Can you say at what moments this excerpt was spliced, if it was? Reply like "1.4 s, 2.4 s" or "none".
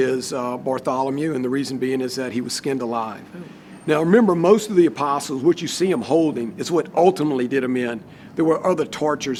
none